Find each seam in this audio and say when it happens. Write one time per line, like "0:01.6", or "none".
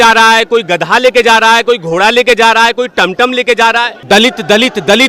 0:04.0

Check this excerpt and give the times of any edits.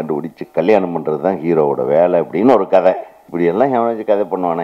0:03.2

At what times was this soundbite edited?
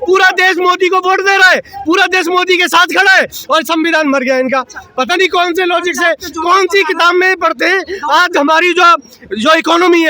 none

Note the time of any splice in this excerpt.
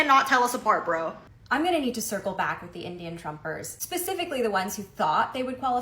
0:01.2

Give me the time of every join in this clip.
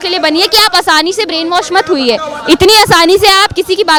none

